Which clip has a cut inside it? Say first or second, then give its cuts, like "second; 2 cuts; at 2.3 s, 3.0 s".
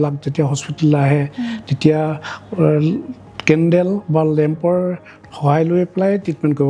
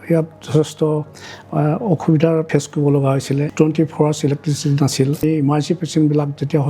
second; 3 cuts; at 2.5 s, 3.5 s, 5.2 s